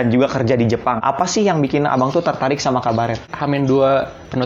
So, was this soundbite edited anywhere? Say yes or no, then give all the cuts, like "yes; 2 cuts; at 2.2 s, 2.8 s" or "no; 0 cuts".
yes; 2 cuts; at 1.0 s, 3.3 s